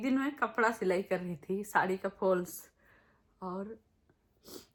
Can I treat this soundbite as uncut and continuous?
yes; 0 cuts

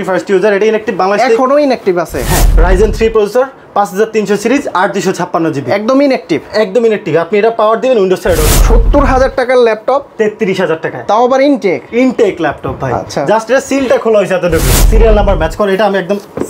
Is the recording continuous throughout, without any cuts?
no; 3 cuts; at 2.3 s, 8.5 s, 14.9 s

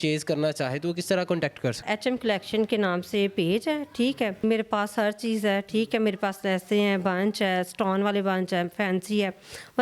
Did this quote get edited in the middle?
yes; 1 cut; at 1.9 s

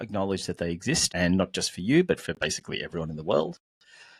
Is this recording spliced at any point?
yes; 1 cut; at 1.1 s

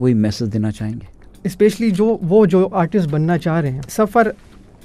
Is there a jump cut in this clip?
yes; 1 cut; at 3.8 s

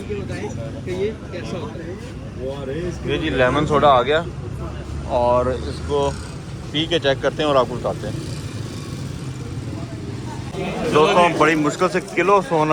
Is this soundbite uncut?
no; 1 cut; at 10.5 s

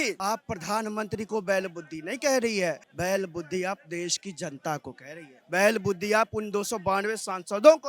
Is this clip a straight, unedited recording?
no; 1 cut; at 2.9 s

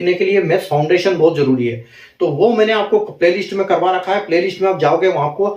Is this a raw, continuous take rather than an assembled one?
yes; 0 cuts

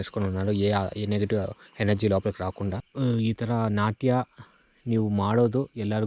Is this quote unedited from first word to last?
no; 1 cut; at 2.8 s

